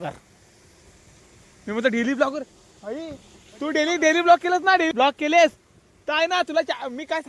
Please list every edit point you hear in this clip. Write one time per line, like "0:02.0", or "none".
0:04.9